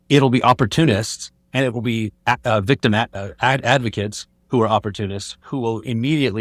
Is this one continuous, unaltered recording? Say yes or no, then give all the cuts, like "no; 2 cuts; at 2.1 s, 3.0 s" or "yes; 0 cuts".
yes; 0 cuts